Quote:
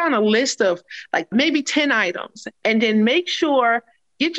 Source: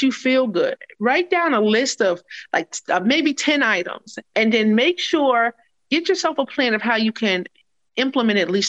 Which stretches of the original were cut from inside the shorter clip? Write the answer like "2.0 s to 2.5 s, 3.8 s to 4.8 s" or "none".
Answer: 2.7 s to 3.0 s